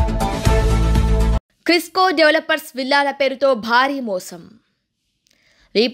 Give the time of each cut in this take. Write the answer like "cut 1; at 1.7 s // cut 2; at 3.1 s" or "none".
cut 1; at 1.4 s